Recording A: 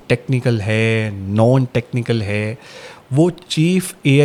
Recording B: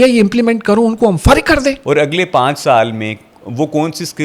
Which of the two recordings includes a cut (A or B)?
B